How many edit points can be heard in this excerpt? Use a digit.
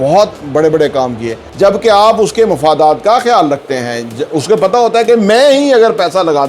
1